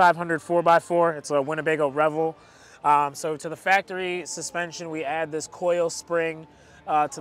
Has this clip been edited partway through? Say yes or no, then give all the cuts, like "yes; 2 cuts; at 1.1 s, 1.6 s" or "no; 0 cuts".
no; 0 cuts